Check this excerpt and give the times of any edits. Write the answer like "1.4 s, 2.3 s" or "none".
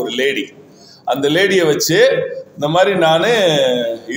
none